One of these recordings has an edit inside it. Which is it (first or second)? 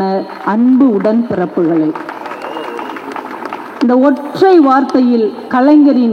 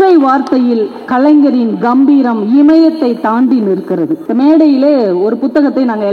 second